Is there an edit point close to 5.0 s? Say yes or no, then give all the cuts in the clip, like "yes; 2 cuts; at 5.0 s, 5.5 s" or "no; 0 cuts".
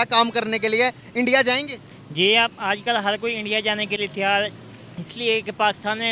no; 0 cuts